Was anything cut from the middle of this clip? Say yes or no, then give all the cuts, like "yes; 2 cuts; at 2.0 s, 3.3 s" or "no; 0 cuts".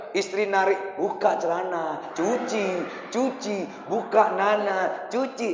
no; 0 cuts